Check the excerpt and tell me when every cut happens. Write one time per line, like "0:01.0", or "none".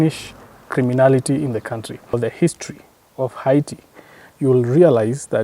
0:02.1